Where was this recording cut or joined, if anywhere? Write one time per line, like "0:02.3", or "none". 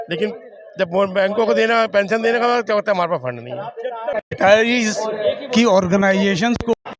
0:04.1